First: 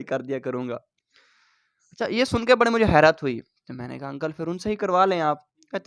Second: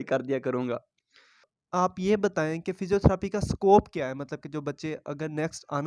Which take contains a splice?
second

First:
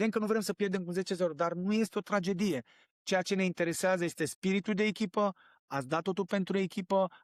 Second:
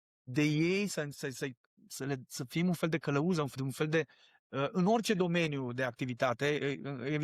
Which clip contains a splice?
second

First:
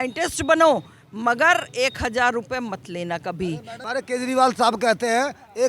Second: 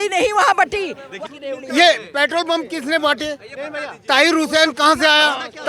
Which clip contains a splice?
first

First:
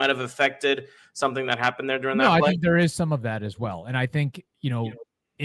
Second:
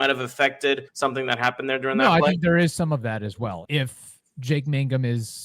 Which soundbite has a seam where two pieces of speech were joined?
second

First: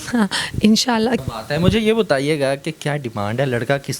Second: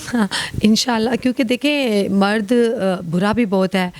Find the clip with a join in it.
first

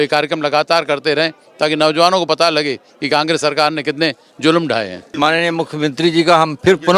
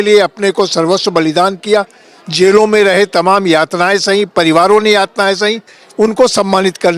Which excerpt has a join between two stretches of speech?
first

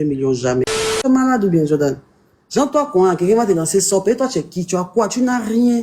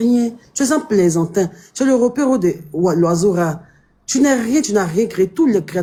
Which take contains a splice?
first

